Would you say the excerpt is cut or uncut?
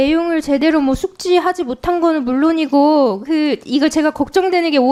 uncut